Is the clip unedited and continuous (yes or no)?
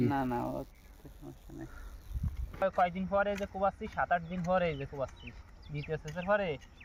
no